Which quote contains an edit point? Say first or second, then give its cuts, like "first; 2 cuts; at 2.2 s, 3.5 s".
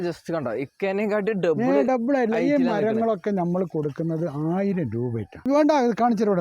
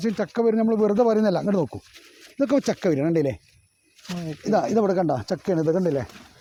first; 1 cut; at 5.4 s